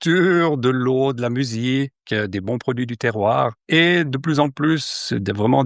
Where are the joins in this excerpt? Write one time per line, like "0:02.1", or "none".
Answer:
0:03.6